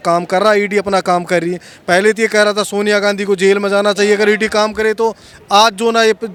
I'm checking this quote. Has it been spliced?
no; 0 cuts

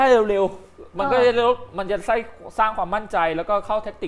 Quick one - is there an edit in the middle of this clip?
no; 0 cuts

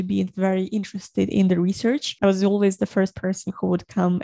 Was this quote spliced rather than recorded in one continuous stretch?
no; 0 cuts

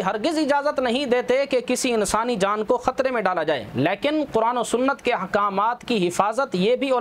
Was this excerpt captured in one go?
yes; 0 cuts

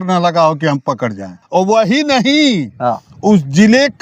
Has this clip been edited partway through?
yes; 1 cut; at 1.4 s

